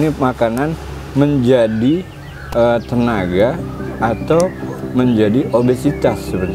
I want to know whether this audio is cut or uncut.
uncut